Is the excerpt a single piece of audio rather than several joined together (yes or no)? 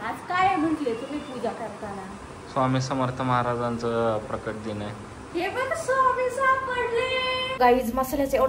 no